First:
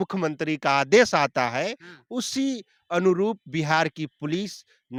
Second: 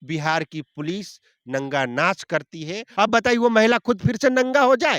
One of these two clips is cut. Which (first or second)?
second